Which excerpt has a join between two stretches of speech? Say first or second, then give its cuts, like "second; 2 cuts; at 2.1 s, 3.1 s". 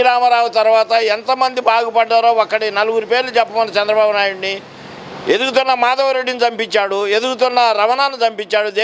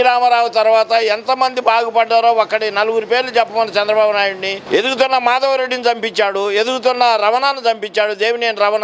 second; 1 cut; at 4.5 s